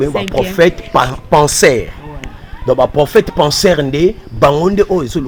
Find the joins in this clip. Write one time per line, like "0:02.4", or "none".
none